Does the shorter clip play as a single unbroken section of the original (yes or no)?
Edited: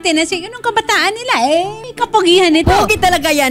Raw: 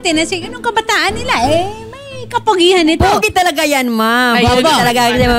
no